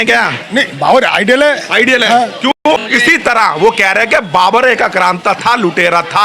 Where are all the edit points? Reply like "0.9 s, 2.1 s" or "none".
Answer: 2.5 s